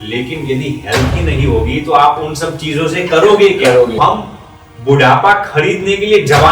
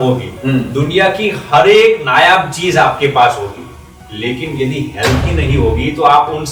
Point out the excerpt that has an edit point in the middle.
first; 1 cut; at 4.0 s

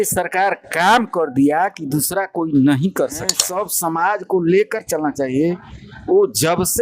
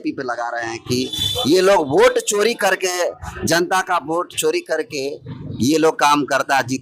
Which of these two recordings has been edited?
first; 1 cut; at 3.4 s

